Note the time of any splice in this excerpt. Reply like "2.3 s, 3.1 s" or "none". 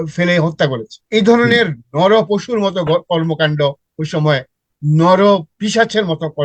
0.9 s, 5.5 s